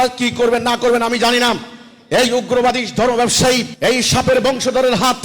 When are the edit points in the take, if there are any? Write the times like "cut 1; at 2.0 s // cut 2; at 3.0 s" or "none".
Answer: cut 1; at 3.7 s